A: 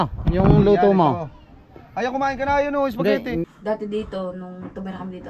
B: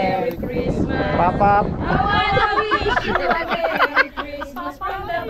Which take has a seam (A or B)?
A